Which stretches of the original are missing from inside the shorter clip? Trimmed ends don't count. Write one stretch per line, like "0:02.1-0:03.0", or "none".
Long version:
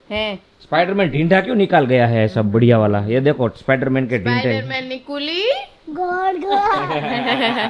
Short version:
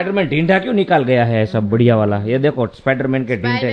none